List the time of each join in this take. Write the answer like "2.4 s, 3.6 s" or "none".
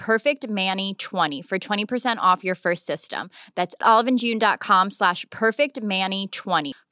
1.4 s